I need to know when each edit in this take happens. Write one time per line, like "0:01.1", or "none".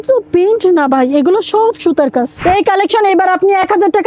0:02.3